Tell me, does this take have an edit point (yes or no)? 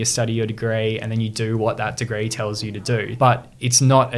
yes